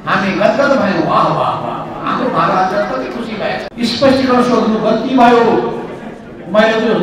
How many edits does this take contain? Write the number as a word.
one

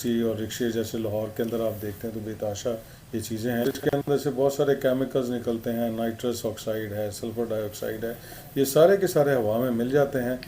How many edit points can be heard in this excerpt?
one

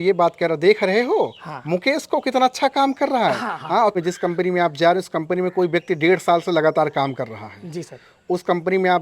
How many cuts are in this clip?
one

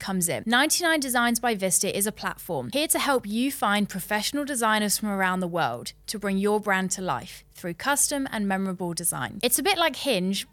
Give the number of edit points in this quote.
zero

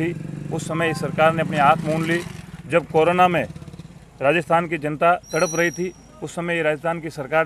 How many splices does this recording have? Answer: zero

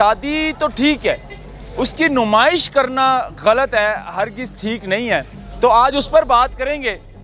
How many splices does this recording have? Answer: zero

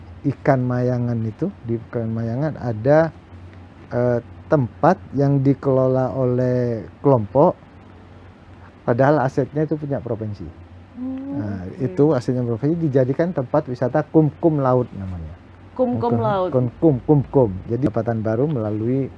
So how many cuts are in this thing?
one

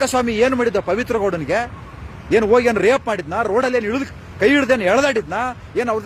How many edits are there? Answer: zero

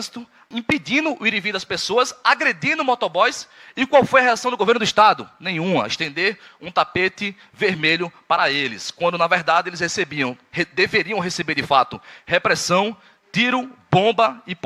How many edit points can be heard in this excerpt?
zero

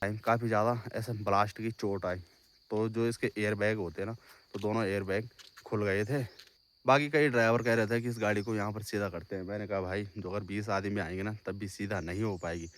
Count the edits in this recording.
one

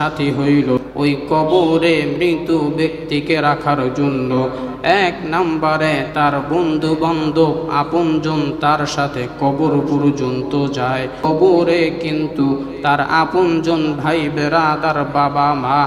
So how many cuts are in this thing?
two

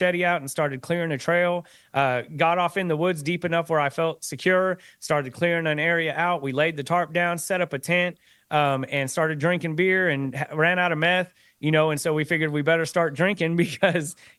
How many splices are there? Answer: zero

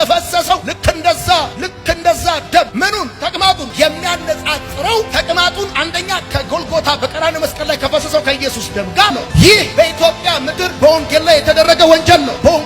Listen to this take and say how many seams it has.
two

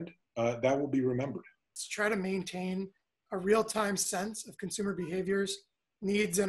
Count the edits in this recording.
one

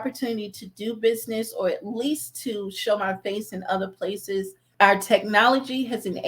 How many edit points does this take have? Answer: one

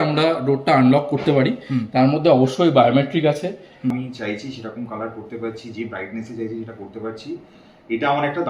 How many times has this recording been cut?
one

